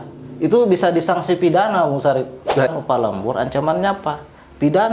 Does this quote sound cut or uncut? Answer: cut